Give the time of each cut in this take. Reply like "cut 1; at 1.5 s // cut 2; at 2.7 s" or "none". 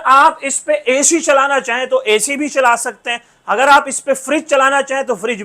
none